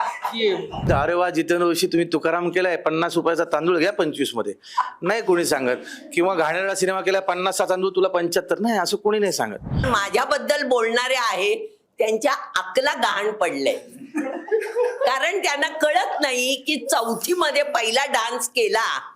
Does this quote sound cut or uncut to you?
cut